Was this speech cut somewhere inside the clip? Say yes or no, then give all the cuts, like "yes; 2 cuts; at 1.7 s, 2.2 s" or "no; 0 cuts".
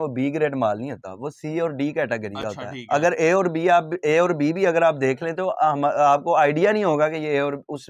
no; 0 cuts